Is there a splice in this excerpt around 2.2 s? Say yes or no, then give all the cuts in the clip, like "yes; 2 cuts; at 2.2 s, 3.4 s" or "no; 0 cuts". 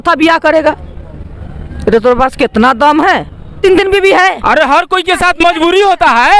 no; 1 cut; at 3.5 s